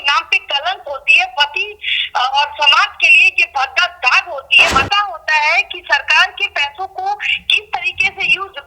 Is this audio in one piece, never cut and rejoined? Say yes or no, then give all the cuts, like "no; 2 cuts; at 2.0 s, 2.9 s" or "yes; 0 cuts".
no; 1 cut; at 4.7 s